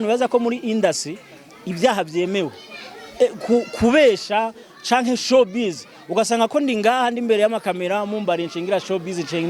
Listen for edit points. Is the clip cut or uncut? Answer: uncut